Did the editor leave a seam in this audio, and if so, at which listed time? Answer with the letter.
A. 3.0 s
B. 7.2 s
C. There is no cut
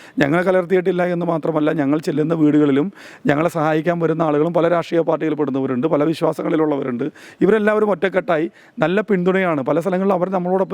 C